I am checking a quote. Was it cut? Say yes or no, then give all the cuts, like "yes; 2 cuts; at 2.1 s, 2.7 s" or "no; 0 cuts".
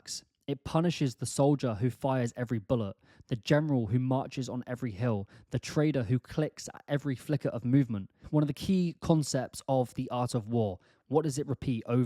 yes; 1 cut; at 8.2 s